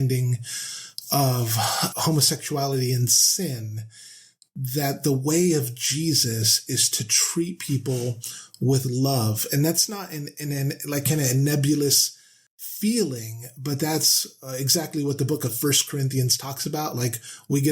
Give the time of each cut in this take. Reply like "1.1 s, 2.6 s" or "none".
1.9 s